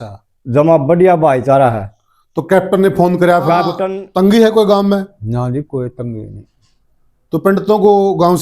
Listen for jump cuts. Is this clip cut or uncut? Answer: cut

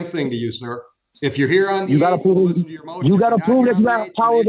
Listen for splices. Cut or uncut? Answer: uncut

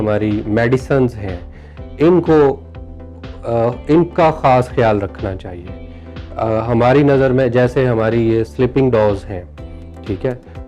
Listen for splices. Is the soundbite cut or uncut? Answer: uncut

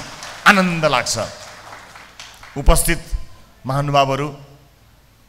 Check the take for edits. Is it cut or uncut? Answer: uncut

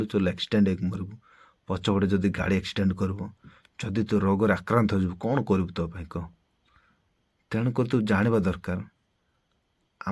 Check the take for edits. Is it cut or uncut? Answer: cut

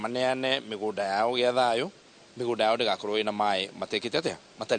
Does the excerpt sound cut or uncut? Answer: uncut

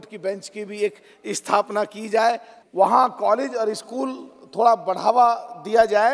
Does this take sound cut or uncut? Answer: cut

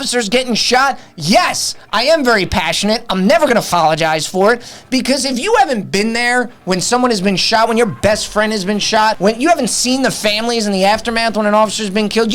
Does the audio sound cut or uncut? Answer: cut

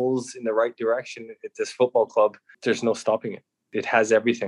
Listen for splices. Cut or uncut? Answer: cut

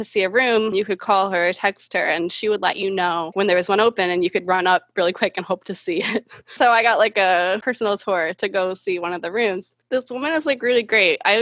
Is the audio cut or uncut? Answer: cut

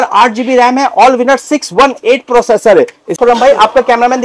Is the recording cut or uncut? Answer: cut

